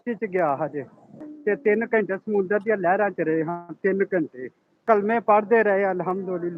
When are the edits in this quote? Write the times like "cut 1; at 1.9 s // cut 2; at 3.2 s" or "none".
cut 1; at 1.2 s // cut 2; at 4.8 s